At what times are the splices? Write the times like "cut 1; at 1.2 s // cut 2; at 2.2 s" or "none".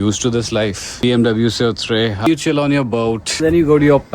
cut 1; at 1.0 s // cut 2; at 2.3 s // cut 3; at 3.4 s